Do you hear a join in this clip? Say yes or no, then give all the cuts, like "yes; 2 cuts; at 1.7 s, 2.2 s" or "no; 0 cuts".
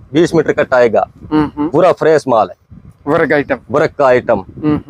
no; 0 cuts